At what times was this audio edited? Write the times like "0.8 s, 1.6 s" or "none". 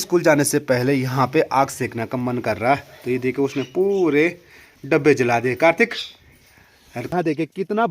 7.0 s